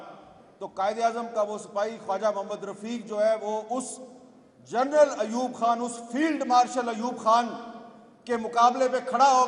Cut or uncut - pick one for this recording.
uncut